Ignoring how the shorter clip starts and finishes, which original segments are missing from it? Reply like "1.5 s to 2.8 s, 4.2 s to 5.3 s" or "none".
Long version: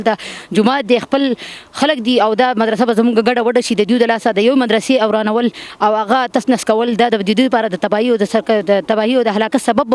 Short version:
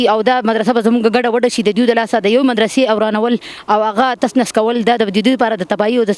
none